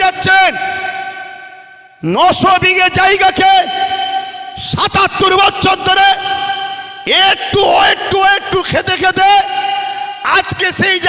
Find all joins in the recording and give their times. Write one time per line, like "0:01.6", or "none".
none